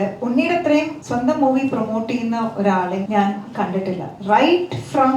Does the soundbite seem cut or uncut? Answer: cut